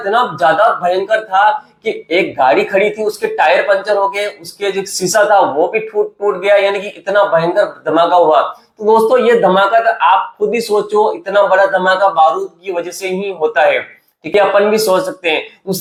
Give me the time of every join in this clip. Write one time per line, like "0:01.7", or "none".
none